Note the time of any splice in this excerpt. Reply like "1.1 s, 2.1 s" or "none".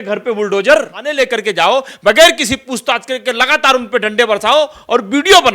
1.0 s